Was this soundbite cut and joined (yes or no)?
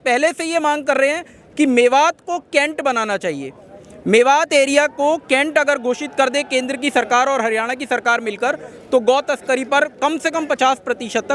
no